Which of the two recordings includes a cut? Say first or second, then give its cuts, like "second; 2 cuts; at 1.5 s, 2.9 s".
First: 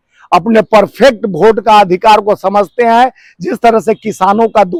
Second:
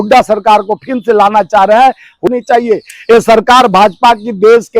second; 1 cut; at 2.3 s